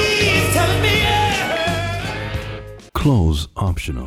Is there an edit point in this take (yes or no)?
no